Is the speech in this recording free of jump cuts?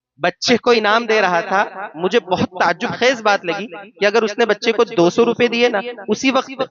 yes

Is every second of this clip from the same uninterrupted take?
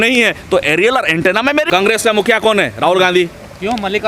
no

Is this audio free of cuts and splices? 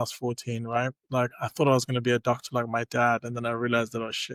yes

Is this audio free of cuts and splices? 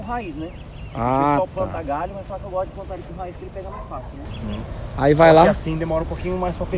no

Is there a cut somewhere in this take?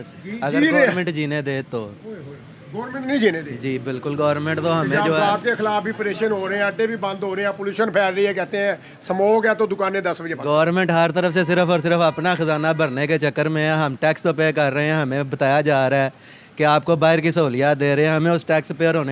no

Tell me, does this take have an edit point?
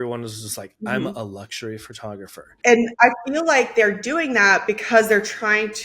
yes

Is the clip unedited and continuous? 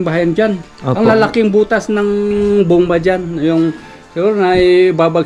yes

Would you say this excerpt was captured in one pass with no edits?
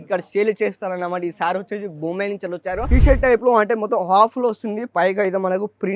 no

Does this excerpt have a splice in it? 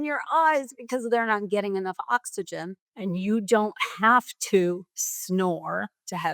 yes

